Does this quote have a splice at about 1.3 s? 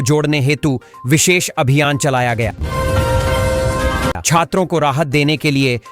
no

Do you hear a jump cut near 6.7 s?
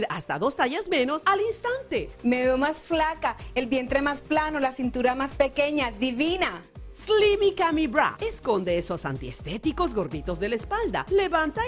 no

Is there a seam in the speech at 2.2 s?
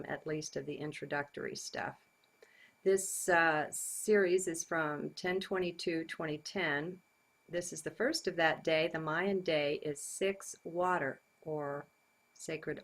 no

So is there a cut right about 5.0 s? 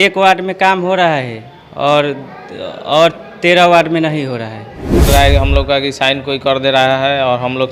yes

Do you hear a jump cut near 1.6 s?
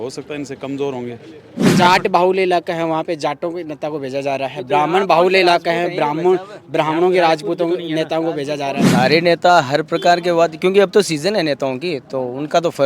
yes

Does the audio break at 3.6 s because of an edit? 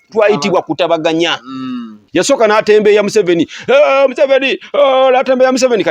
no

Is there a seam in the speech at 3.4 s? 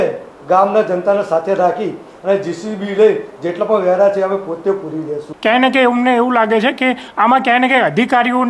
no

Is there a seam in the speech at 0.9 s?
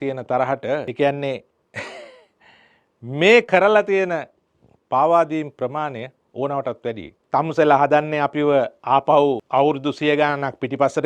yes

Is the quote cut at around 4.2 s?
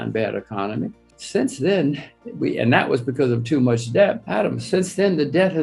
yes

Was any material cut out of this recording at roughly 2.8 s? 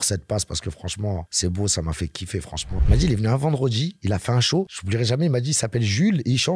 yes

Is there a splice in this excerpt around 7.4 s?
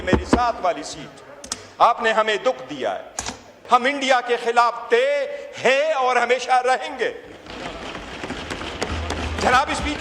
no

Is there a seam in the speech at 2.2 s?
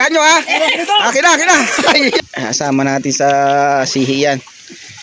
yes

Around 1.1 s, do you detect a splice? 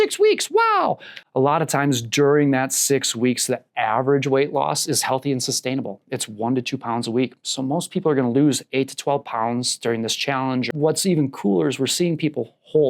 yes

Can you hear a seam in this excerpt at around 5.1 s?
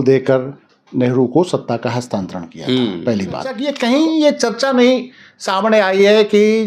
no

